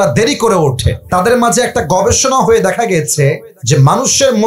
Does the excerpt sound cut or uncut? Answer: cut